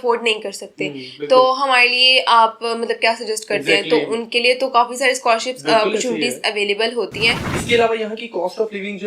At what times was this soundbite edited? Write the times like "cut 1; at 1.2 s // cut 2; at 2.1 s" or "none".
cut 1; at 7.5 s